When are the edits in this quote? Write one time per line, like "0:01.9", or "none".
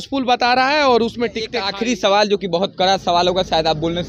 0:01.5